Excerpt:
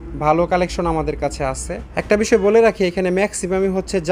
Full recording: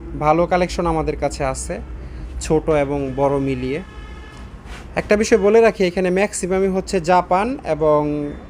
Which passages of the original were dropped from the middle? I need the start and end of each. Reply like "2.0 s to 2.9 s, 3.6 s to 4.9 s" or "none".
1.8 s to 4.8 s